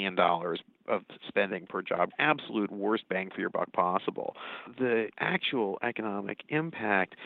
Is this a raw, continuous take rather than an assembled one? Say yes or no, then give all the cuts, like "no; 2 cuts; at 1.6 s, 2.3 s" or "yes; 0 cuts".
no; 2 cuts; at 2.1 s, 4.7 s